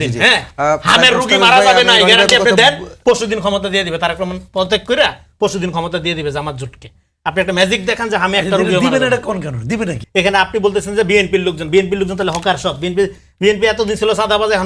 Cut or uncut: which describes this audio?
cut